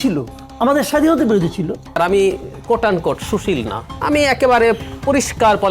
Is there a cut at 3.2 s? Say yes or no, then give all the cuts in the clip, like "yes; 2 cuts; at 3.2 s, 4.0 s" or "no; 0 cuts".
no; 1 cut; at 1.9 s